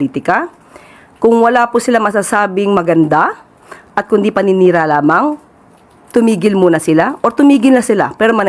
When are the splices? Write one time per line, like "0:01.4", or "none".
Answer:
none